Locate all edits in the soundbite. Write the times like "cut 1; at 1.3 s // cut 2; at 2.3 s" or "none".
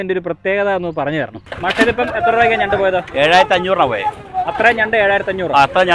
cut 1; at 1.4 s